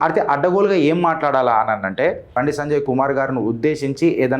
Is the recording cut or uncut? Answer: cut